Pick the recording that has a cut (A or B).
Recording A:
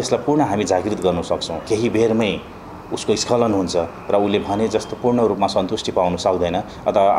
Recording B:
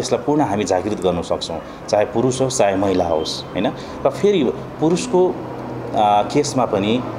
A